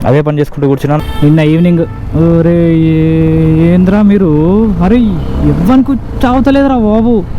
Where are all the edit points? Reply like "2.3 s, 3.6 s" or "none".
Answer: 1.0 s

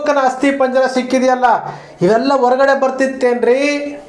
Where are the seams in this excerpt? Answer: none

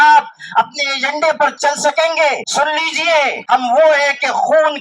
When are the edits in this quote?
2.4 s, 3.4 s

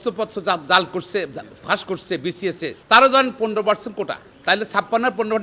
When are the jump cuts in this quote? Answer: 2.8 s, 4.3 s

